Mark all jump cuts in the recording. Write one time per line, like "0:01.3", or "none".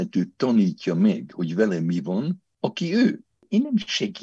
0:02.5
0:03.4